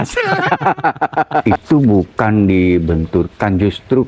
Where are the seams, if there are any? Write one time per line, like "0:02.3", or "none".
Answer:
0:01.5